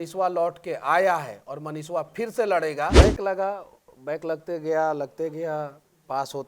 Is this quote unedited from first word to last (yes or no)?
no